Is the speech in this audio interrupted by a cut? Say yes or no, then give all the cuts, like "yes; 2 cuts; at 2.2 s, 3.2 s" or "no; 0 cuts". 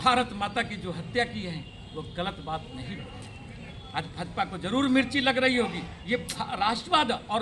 yes; 2 cuts; at 3.7 s, 5.9 s